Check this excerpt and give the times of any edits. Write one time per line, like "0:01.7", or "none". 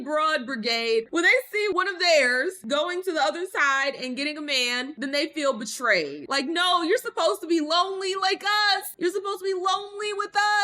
0:01.1